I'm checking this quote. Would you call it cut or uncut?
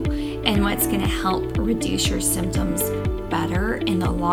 uncut